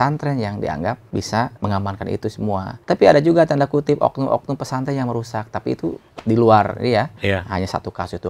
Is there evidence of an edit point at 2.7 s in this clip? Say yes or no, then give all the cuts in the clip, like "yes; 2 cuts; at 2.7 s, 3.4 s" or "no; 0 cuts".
yes; 4 cuts; at 1.2 s, 2.7 s, 6.1 s, 7.1 s